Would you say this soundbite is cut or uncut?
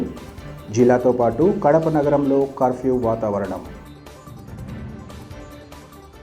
uncut